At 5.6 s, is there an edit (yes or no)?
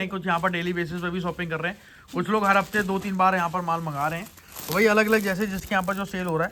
no